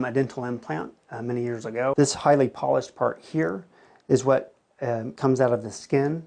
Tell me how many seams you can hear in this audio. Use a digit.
1